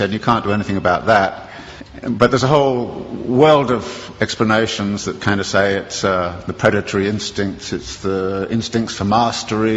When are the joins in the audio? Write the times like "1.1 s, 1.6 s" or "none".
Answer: 5.0 s